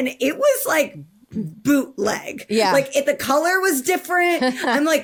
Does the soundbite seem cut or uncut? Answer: uncut